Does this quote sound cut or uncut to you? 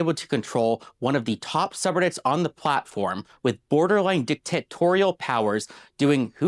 cut